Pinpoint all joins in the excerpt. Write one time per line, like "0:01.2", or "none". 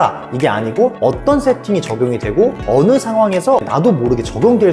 0:01.0
0:02.6
0:03.6